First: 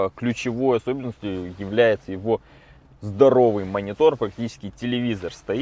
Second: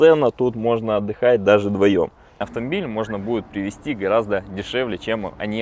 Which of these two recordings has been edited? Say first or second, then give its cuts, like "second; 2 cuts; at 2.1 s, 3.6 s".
second; 1 cut; at 2.4 s